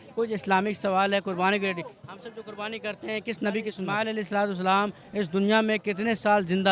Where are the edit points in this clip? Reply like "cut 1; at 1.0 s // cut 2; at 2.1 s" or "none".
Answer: cut 1; at 3.9 s